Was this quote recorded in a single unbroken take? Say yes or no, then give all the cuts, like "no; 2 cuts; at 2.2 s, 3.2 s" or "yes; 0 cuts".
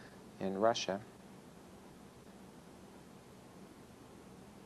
yes; 0 cuts